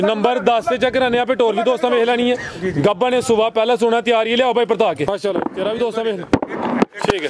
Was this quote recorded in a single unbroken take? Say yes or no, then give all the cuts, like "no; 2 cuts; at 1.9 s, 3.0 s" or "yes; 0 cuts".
no; 1 cut; at 5.1 s